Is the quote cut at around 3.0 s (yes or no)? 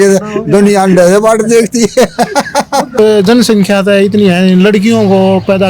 yes